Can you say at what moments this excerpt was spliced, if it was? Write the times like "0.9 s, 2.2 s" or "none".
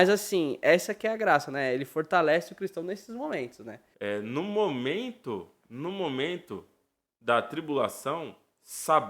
3.8 s

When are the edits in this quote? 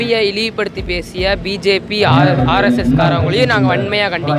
none

